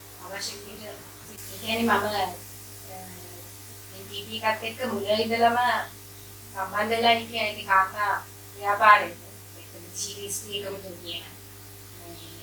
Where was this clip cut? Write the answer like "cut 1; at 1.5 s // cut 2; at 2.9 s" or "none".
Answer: cut 1; at 1.3 s